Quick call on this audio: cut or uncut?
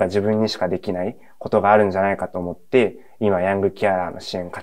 uncut